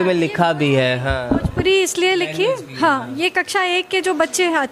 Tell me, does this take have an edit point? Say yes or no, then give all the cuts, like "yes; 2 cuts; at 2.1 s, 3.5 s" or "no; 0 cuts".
no; 0 cuts